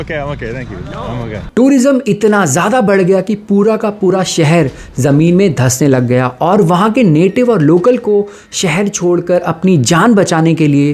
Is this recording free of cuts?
no; 1 cut; at 1.4 s

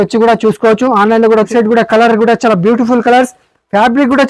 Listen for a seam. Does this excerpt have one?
yes; 1 cut; at 1.5 s

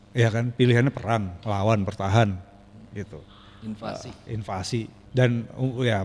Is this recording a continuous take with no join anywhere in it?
no; 1 cut; at 5.0 s

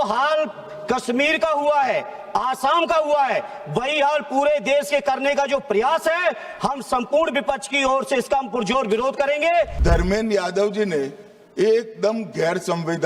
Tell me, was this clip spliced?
yes; 1 cut; at 9.8 s

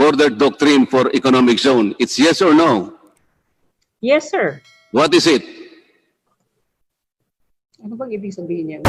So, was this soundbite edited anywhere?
no; 0 cuts

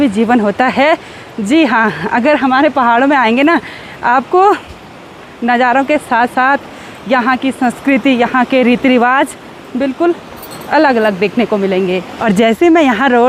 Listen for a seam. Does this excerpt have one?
no; 0 cuts

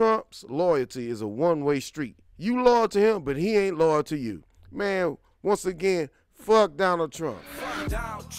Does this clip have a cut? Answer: yes; 1 cut; at 7.5 s

